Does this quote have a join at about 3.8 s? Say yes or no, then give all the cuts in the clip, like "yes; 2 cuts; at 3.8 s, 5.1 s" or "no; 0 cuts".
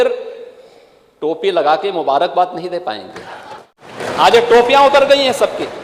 yes; 1 cut; at 3.8 s